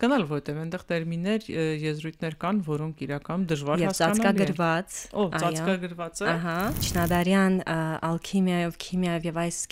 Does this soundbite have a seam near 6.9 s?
yes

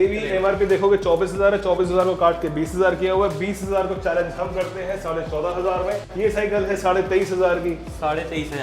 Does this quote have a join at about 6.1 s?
yes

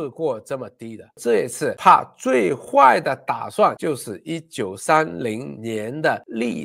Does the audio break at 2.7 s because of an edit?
no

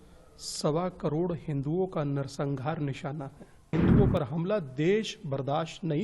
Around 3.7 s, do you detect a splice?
yes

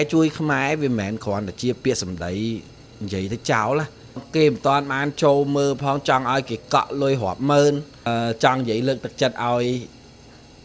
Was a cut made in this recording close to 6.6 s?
no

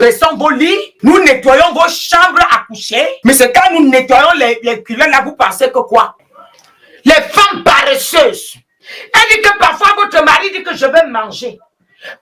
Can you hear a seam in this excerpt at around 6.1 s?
yes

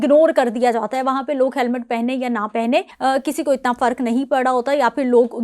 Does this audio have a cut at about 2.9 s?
yes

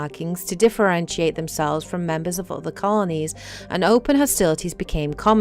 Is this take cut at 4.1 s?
no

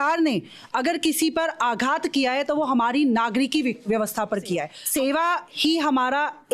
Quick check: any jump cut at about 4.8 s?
yes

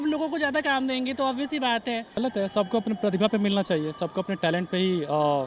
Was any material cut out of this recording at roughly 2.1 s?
yes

